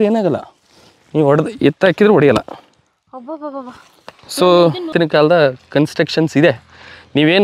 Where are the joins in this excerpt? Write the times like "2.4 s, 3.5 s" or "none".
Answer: 4.9 s